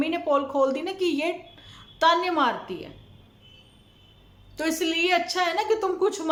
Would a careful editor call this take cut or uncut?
uncut